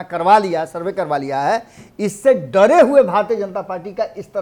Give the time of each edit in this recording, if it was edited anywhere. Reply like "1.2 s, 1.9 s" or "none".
none